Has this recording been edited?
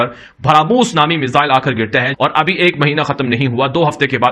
yes; 1 cut; at 2.1 s

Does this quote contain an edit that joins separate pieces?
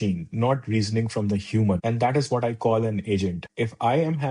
yes; 2 cuts; at 1.8 s, 3.4 s

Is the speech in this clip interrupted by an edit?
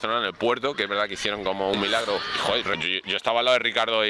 yes; 1 cut; at 2.3 s

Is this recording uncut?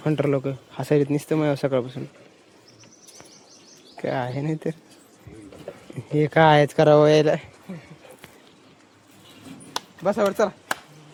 yes; 0 cuts

